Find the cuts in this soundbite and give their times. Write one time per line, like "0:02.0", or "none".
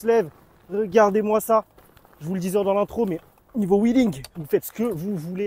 none